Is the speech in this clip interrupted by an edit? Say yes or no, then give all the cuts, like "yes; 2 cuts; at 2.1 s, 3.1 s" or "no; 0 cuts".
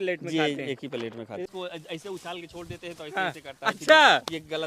yes; 1 cut; at 1.5 s